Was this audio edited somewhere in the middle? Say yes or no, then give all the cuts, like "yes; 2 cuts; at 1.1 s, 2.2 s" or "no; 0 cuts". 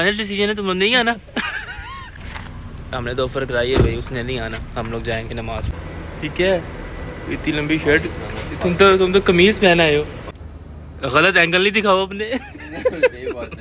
yes; 3 cuts; at 2.5 s, 5.7 s, 10.3 s